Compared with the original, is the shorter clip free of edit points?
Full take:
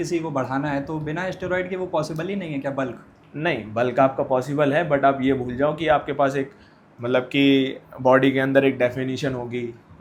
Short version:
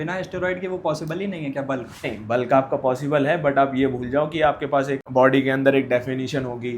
no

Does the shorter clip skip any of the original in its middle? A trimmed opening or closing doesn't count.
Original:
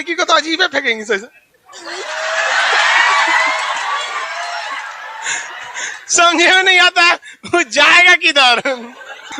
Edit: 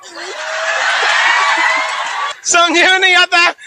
yes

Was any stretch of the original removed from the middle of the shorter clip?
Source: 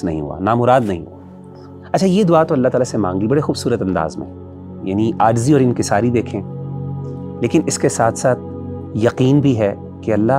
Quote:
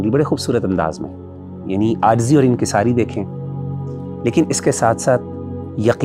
no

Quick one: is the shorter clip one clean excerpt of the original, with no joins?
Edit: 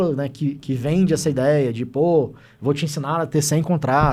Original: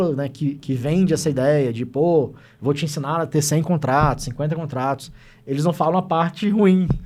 yes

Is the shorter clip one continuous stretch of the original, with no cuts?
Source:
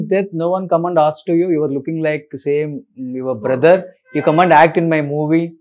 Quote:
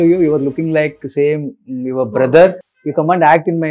yes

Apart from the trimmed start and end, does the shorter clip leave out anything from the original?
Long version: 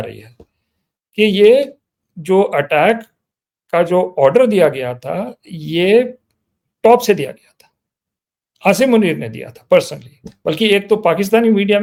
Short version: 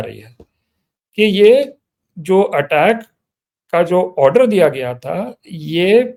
no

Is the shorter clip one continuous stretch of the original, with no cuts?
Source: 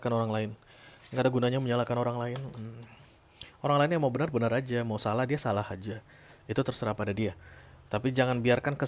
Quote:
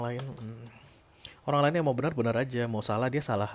yes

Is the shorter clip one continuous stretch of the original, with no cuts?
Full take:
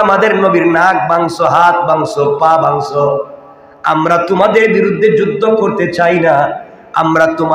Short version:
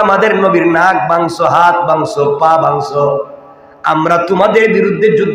yes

